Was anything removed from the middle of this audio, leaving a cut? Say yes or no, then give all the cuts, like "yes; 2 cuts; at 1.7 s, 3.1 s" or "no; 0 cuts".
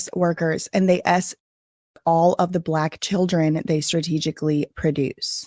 no; 0 cuts